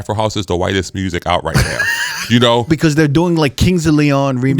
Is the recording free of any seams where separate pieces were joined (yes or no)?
no